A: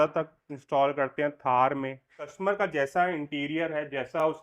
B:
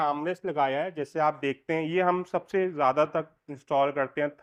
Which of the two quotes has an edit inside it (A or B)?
A